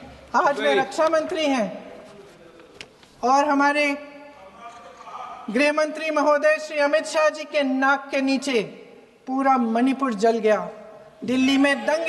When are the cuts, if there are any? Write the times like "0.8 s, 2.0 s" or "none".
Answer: none